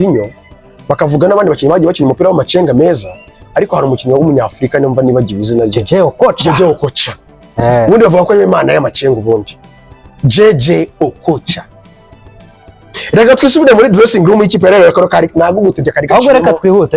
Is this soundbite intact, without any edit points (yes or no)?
yes